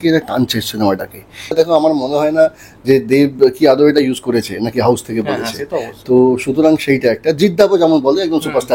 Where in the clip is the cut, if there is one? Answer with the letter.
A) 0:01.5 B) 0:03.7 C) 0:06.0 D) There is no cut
A